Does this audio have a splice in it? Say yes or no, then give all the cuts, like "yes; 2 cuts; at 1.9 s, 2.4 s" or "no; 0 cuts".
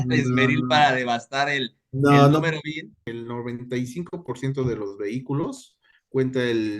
yes; 1 cut; at 3.0 s